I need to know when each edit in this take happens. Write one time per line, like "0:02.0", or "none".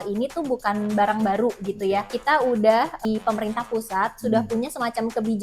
0:02.1
0:03.0